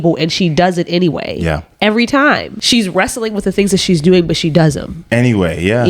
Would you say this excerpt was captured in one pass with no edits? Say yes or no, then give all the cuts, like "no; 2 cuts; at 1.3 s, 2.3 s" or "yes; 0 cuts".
no; 1 cut; at 4.9 s